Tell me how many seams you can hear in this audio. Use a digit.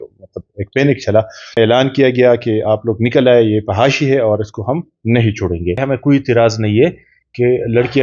2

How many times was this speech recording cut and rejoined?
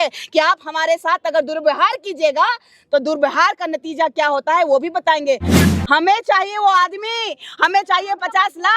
1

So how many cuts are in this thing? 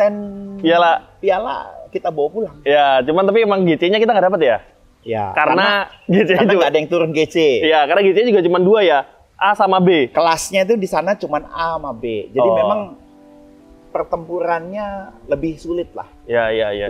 0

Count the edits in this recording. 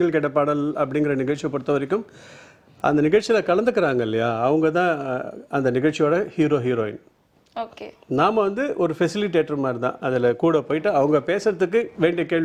0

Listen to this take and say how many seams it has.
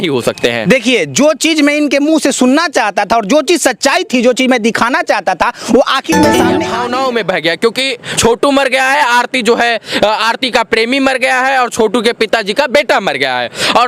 1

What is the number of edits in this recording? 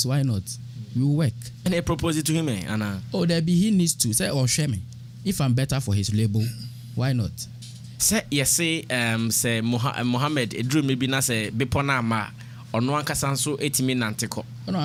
0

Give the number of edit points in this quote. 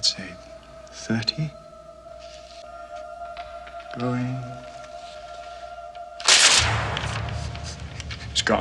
0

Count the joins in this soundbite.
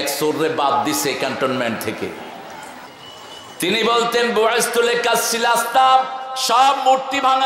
1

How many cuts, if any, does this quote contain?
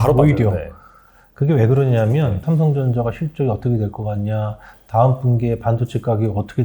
1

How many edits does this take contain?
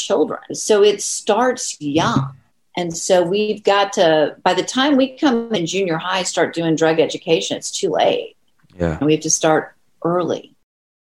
0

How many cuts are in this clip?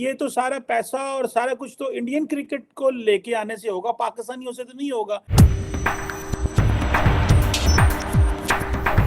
1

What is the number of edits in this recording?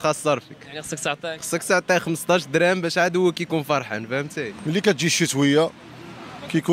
1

